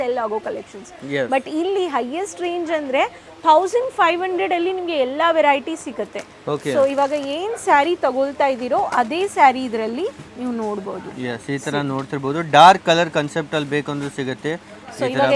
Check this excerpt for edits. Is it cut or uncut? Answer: uncut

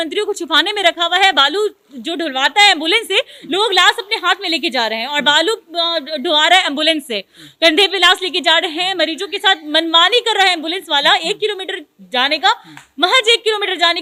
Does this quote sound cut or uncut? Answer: uncut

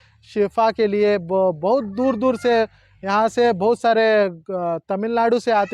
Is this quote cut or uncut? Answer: uncut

